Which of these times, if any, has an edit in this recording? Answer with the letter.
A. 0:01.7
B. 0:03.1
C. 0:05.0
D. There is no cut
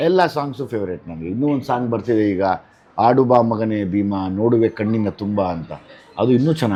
D